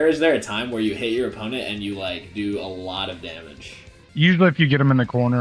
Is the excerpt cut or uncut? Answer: uncut